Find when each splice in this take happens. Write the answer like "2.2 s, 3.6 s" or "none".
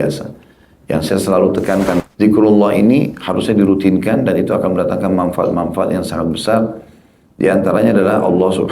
2.0 s

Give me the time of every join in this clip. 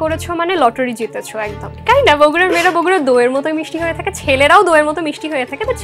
1.8 s

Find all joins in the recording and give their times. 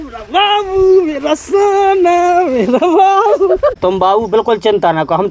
3.7 s

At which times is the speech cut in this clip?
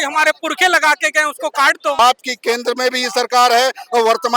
2.0 s

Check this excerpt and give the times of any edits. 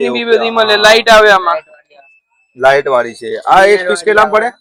none

